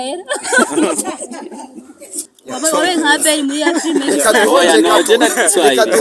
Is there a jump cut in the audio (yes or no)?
yes